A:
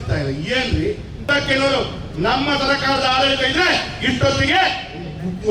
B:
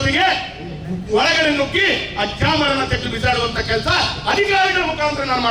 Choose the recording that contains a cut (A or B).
A